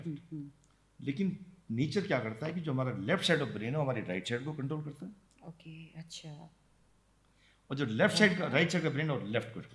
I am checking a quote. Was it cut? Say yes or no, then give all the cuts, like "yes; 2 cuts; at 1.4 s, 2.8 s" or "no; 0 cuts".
no; 0 cuts